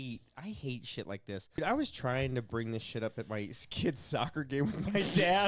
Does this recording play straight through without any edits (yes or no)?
no